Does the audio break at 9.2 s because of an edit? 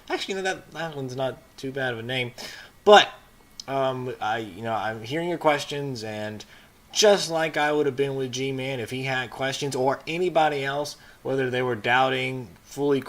yes; 1 cut; at 9.2 s

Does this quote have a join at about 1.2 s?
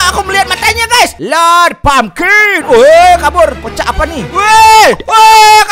yes; 1 cut; at 1.2 s

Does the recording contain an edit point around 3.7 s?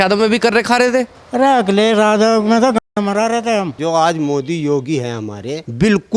yes; 1 cut; at 3.7 s

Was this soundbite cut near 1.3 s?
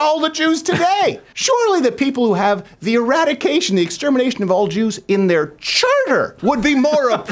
yes; 1 cut; at 1.3 s

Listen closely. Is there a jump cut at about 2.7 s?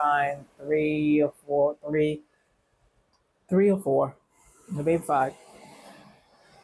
no; 0 cuts

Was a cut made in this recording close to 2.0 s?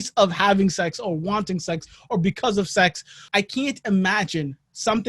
no; 1 cut; at 3.2 s

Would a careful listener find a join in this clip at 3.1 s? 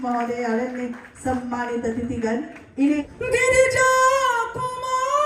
yes; 1 cut; at 3.1 s

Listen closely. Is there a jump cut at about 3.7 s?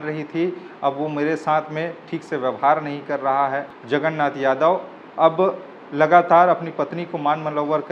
yes; 1 cut; at 3.7 s

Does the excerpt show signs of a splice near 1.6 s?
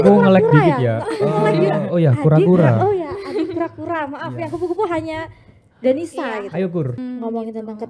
no; 1 cut; at 7.0 s

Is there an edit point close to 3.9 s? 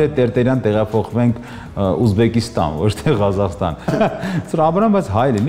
yes; 1 cut; at 3.9 s

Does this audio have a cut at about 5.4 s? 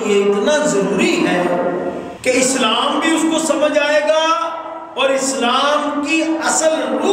no; 1 cut; at 2.1 s

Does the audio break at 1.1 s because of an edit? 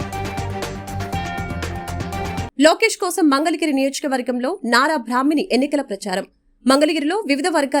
no; 1 cut; at 2.5 s

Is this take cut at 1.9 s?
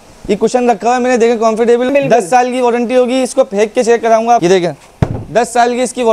yes; 2 cuts; at 1.9 s, 4.4 s

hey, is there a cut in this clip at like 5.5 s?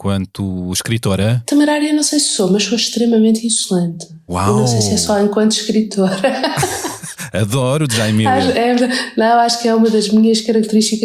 no; 1 cut; at 1.3 s

